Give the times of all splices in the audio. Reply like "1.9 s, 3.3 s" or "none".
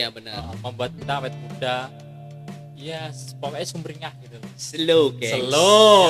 none